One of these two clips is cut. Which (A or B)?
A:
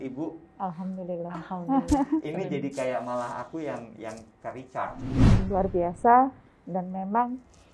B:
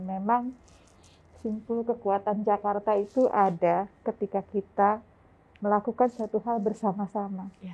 A